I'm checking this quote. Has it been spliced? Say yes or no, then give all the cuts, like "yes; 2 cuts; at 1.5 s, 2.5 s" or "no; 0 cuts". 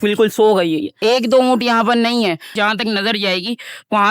yes; 1 cut; at 0.9 s